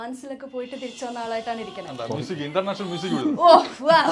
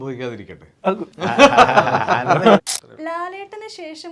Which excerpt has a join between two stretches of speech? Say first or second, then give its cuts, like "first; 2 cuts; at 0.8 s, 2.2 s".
second; 2 cuts; at 1.1 s, 2.8 s